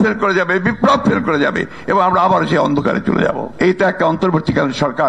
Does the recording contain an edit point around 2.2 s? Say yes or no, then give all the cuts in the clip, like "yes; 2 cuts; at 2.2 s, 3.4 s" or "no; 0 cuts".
no; 1 cut; at 3.5 s